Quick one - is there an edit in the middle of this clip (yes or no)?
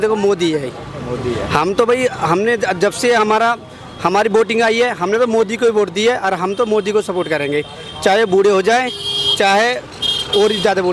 no